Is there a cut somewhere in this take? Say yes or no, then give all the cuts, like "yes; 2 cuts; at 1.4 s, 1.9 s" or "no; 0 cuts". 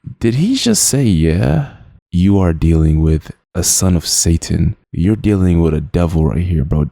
yes; 1 cut; at 2.0 s